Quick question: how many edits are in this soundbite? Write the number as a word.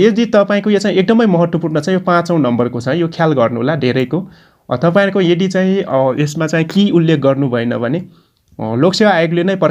zero